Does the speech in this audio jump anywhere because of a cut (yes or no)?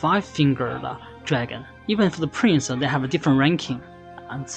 yes